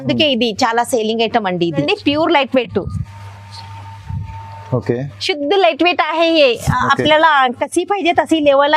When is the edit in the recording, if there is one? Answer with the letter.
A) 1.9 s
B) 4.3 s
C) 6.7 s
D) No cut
A